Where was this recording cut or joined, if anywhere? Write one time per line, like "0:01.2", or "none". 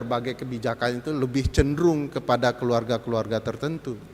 none